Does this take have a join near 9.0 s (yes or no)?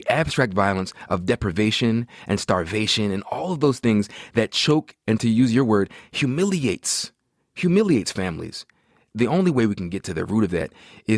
yes